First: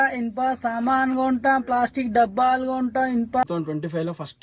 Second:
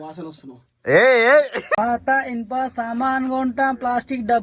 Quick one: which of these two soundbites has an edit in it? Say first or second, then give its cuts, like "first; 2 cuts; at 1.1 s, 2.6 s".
first; 1 cut; at 3.4 s